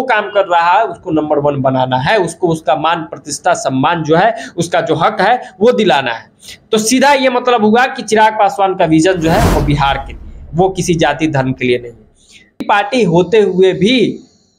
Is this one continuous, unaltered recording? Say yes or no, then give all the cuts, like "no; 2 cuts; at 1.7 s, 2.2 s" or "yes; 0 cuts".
no; 1 cut; at 12.6 s